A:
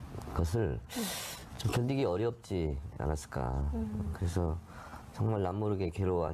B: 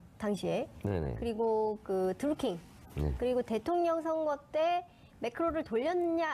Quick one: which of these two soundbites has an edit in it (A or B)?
A